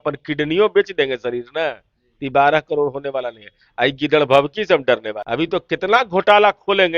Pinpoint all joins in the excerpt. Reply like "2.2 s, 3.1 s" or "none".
5.2 s